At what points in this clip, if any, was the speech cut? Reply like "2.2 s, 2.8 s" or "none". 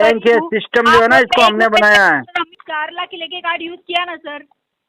2.6 s